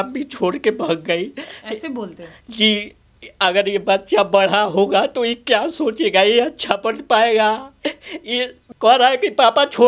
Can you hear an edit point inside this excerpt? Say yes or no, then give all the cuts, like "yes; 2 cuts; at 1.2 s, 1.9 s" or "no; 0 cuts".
yes; 1 cut; at 8.6 s